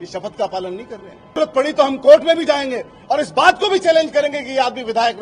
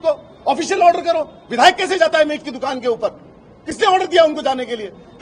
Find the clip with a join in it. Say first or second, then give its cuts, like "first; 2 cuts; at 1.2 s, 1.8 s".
first; 1 cut; at 1.4 s